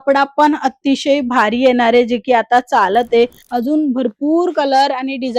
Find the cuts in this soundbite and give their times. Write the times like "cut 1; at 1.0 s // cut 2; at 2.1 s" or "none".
cut 1; at 3.4 s